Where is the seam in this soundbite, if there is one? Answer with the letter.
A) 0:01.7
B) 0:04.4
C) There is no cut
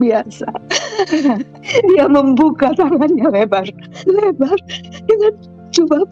A